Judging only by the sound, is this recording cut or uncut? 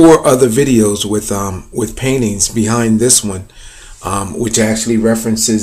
uncut